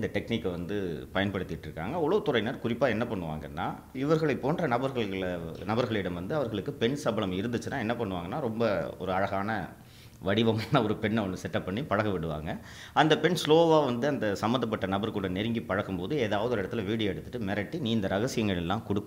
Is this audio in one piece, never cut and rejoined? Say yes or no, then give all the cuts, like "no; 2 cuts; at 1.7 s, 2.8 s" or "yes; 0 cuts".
no; 1 cut; at 3.9 s